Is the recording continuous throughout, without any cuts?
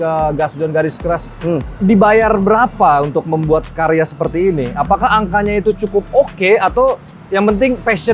yes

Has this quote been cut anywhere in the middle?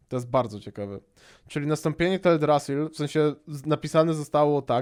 no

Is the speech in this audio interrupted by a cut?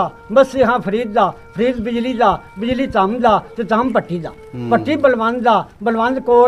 no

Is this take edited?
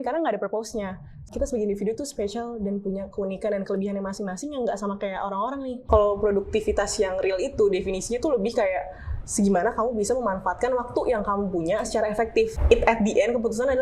yes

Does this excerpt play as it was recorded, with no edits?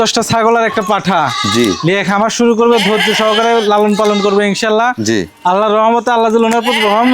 yes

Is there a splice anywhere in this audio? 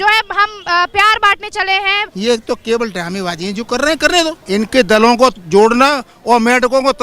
yes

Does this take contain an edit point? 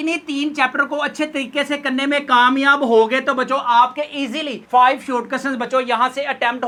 no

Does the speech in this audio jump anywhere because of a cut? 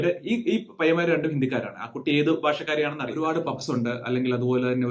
yes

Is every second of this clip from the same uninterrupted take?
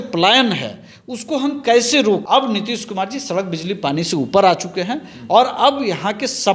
no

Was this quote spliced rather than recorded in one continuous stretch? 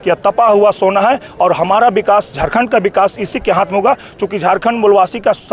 no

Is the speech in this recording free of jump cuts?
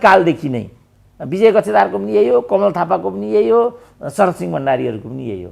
yes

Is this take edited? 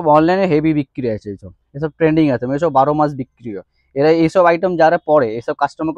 no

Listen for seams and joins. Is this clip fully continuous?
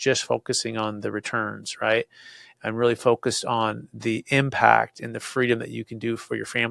yes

